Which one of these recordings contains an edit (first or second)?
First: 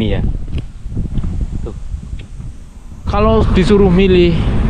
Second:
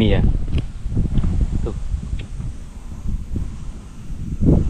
first